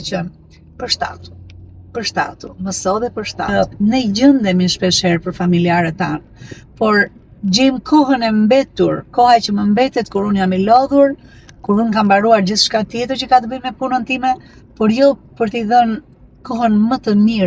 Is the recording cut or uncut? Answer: cut